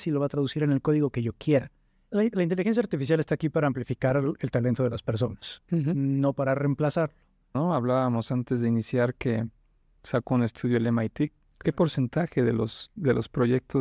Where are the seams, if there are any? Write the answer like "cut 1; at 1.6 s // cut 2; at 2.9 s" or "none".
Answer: cut 1; at 2.0 s // cut 2; at 7.6 s